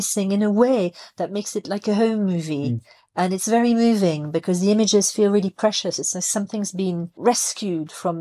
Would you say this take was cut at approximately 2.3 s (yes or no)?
no